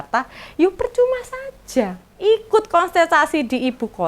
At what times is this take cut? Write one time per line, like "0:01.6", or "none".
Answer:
0:02.0